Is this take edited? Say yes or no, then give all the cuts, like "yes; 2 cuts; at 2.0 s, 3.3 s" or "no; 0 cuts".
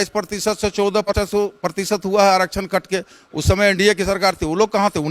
yes; 1 cut; at 1.1 s